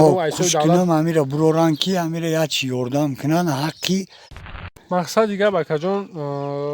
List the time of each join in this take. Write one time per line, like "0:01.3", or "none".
0:04.6